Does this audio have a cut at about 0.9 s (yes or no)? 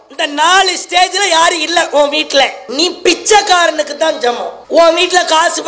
no